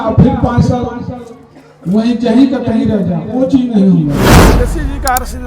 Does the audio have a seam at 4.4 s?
yes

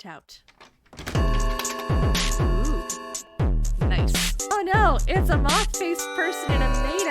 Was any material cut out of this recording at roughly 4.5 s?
yes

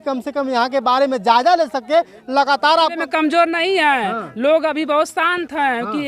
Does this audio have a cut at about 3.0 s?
yes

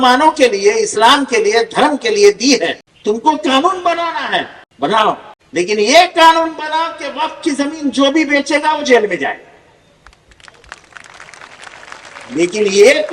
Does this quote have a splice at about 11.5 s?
no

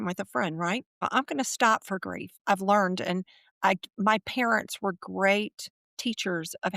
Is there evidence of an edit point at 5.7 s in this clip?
no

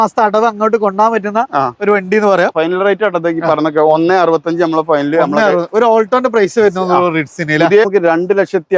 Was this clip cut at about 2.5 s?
yes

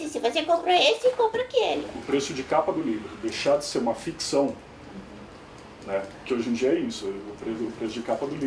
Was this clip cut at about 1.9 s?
yes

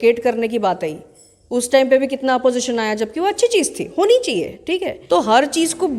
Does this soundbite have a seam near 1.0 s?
no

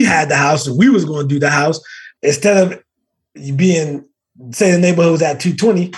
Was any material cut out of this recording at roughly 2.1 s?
yes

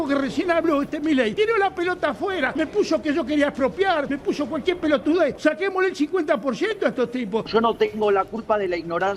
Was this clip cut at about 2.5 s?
yes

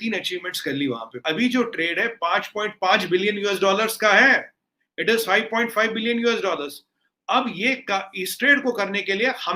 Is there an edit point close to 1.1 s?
yes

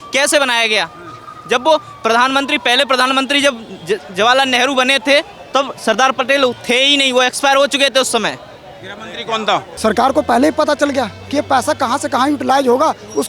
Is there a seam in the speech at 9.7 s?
yes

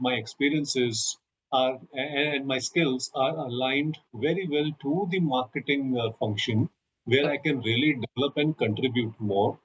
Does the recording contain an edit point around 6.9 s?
no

